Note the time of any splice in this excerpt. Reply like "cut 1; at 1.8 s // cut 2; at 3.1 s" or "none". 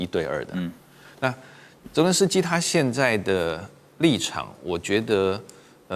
none